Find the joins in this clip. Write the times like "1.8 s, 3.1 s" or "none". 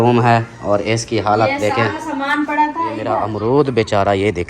3.1 s